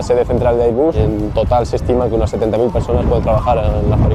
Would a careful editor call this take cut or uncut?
cut